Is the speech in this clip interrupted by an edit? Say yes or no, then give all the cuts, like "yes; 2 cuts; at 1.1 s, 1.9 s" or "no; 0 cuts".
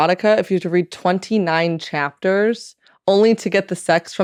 no; 0 cuts